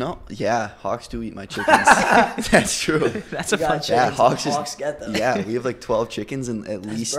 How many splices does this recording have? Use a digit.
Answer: 0